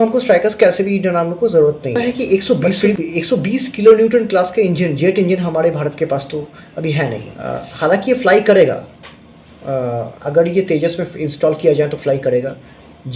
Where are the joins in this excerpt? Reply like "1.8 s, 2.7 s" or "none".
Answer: 2.0 s, 7.3 s